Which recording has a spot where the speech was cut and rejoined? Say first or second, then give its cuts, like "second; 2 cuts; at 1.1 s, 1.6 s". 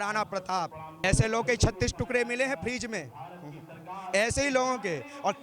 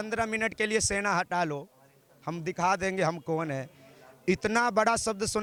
first; 1 cut; at 1.0 s